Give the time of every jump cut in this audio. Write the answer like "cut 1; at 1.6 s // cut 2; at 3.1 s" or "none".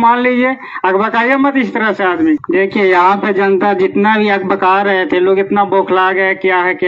cut 1; at 2.4 s